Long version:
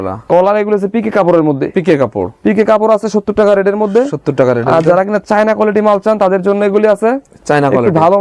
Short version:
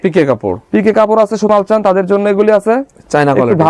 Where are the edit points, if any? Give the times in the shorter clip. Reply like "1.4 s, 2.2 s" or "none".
1.5 s